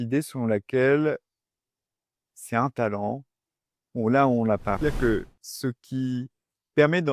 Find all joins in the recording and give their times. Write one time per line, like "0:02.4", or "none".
0:04.8